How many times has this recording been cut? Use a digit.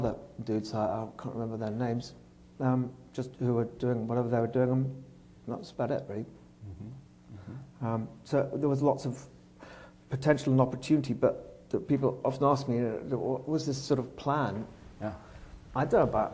1